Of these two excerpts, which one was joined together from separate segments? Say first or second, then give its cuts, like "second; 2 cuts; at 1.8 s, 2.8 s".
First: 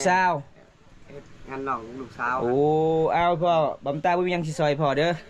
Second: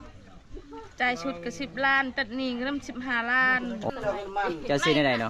second; 1 cut; at 3.9 s